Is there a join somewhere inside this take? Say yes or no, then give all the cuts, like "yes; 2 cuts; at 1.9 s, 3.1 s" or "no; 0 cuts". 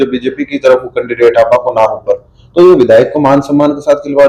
no; 0 cuts